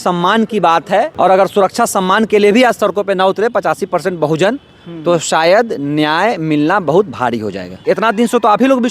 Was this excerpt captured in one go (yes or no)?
no